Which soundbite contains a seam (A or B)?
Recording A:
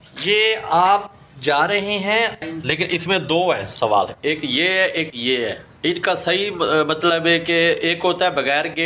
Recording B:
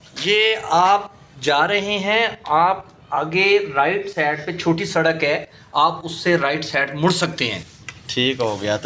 A